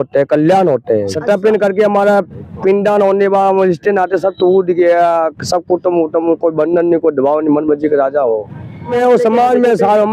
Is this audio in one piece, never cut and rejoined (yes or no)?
no